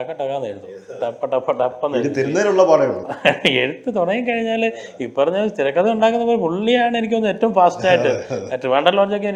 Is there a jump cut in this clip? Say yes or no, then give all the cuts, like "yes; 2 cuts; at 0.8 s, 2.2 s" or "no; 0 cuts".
no; 0 cuts